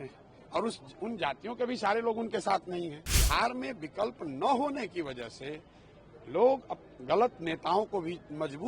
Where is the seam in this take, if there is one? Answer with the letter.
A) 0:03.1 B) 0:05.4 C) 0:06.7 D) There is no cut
A